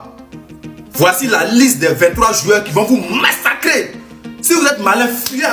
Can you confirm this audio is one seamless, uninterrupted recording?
yes; 0 cuts

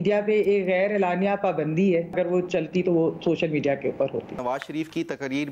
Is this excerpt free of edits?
no; 2 cuts; at 2.1 s, 4.4 s

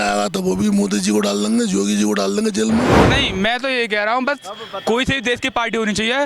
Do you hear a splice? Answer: yes; 1 cut; at 3.0 s

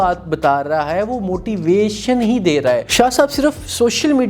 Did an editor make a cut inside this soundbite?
yes; 1 cut; at 2.9 s

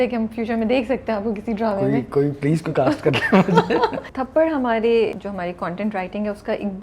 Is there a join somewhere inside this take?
yes; 2 cuts; at 4.1 s, 5.1 s

